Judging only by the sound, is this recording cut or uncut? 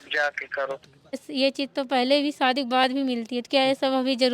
cut